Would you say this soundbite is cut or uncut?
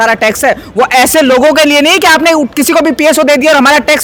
uncut